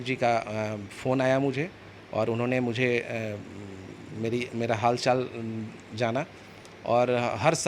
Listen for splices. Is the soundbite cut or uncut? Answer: uncut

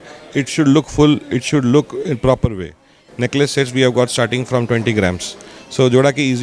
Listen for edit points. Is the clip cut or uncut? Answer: cut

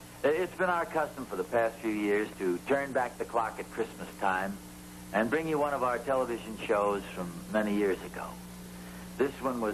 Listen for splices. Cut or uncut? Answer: uncut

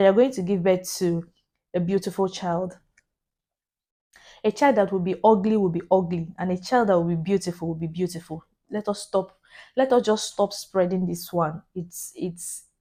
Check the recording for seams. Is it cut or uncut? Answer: uncut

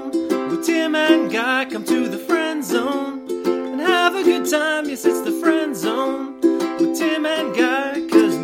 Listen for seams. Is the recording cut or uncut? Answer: uncut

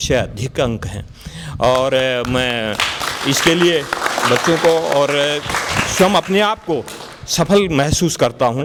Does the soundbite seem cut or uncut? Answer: uncut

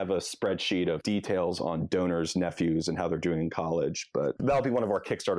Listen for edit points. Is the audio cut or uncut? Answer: cut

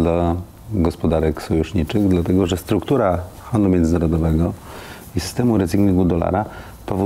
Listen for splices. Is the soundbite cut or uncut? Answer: uncut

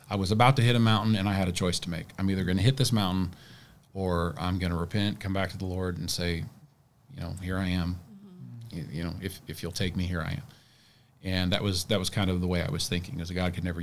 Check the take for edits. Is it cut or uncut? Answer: uncut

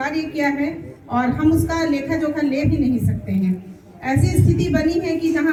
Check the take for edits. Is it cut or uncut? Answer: uncut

